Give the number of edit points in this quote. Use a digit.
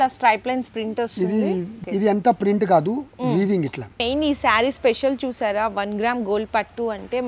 2